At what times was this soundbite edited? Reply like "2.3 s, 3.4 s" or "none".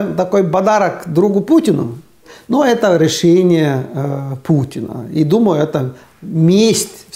2.3 s